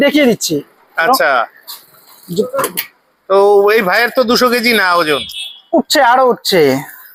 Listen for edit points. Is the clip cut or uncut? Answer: uncut